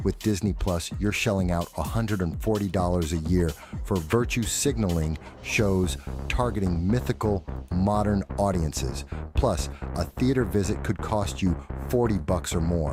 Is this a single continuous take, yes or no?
yes